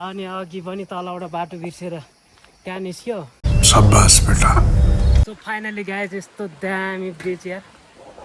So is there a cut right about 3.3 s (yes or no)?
yes